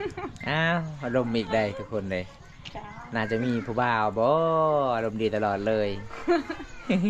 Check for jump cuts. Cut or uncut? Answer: uncut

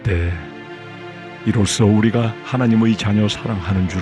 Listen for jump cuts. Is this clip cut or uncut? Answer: uncut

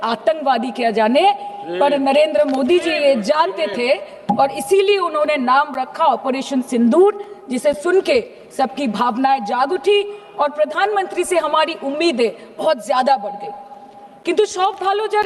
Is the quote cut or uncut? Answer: uncut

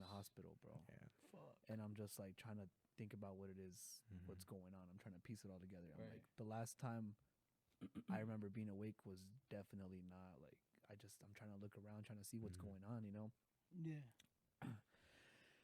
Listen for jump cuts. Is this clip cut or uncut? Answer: uncut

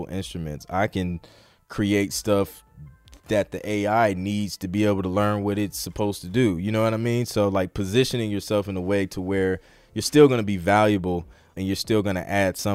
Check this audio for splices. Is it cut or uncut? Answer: uncut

